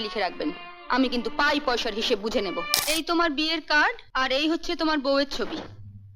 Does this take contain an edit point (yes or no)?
yes